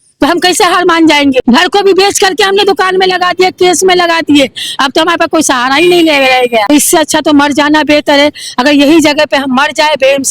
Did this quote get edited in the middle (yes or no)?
yes